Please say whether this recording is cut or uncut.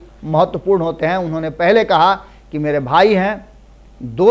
uncut